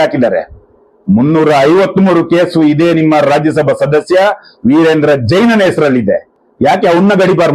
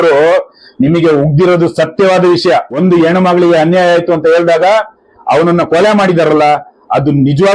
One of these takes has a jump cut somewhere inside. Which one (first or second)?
second